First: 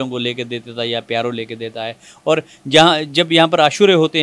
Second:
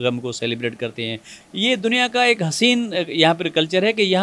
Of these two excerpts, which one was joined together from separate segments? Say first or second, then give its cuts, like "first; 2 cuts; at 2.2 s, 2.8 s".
second; 1 cut; at 1.3 s